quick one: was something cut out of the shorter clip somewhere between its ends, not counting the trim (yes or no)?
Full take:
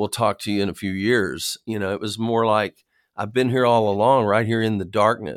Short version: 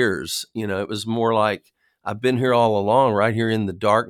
no